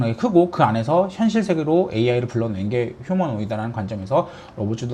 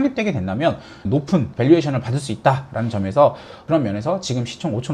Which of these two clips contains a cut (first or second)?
second